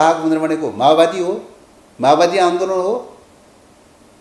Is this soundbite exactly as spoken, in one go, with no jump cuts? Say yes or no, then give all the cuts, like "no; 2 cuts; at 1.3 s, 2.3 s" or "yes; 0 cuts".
yes; 0 cuts